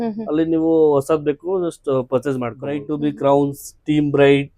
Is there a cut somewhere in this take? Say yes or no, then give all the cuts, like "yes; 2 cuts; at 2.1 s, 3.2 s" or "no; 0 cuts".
yes; 1 cut; at 2.8 s